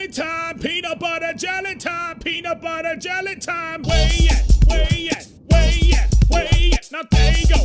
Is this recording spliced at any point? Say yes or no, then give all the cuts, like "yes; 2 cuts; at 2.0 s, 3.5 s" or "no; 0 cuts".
no; 0 cuts